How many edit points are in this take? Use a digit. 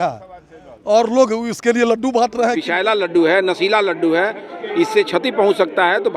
1